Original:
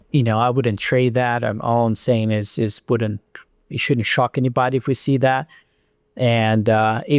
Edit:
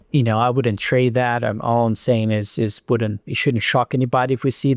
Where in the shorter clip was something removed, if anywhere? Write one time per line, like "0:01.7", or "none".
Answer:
0:03.3